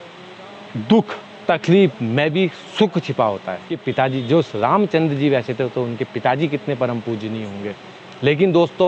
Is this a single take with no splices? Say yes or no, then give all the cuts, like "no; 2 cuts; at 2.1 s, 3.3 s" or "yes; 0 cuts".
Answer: no; 1 cut; at 3.8 s